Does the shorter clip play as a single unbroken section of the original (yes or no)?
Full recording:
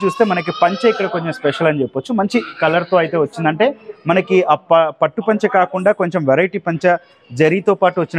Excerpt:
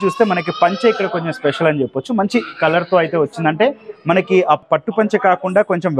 no